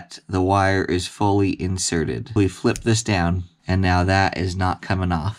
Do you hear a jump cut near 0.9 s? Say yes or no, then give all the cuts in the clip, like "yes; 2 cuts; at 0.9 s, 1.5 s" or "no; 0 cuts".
no; 2 cuts; at 2.3 s, 3.5 s